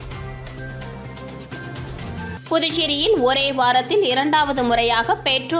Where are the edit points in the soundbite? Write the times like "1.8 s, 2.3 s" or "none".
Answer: 1.1 s

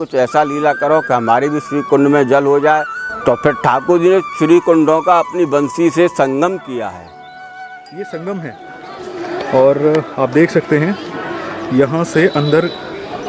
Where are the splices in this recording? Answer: 3.0 s, 7.7 s

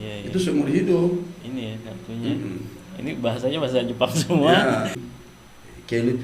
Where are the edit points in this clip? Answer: 5.1 s

